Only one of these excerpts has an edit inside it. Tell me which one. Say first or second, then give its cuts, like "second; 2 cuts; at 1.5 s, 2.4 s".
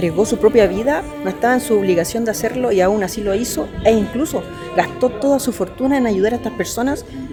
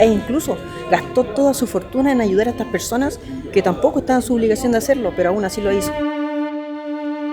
second; 1 cut; at 5.8 s